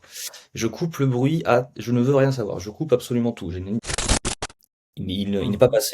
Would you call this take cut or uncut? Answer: cut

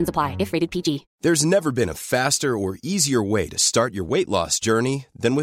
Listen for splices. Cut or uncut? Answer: cut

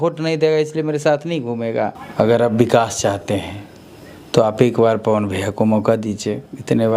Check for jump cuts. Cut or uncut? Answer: cut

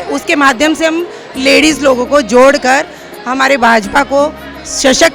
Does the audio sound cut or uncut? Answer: uncut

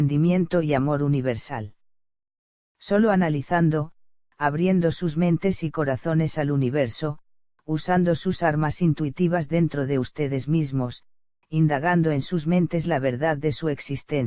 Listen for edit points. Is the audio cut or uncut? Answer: uncut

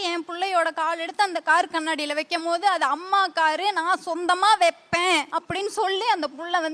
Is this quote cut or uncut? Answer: cut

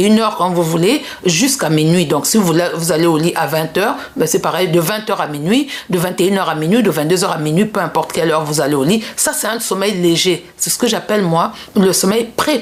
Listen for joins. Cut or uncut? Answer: uncut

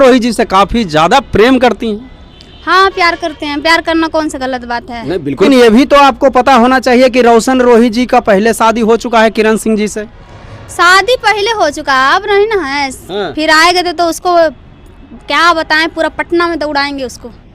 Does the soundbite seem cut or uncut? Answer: cut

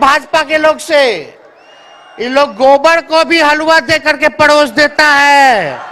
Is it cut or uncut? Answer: uncut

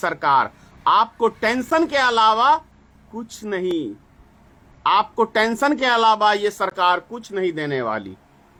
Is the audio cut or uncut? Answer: uncut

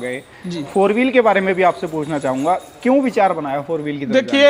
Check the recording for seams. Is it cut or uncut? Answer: uncut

